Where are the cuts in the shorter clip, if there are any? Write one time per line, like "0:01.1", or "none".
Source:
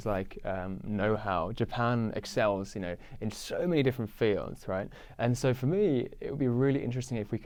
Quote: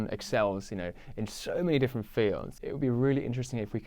0:02.6